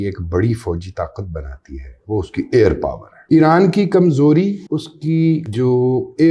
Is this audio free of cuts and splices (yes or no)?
no